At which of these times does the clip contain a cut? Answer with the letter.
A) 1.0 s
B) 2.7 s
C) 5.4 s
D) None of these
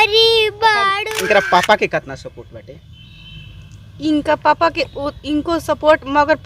A